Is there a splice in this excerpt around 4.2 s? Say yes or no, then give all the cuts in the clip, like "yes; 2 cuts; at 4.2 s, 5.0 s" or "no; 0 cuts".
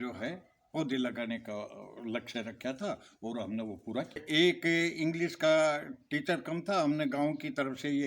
yes; 1 cut; at 4.2 s